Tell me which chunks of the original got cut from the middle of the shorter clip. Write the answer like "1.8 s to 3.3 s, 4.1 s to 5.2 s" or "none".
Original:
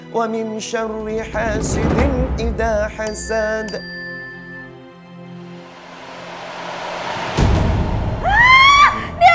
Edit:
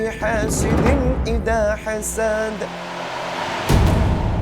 4.0 s to 6.5 s